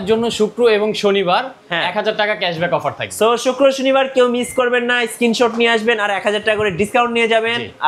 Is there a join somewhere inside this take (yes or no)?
no